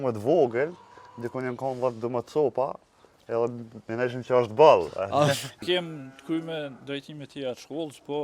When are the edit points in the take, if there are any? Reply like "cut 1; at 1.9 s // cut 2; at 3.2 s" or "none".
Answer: cut 1; at 5.6 s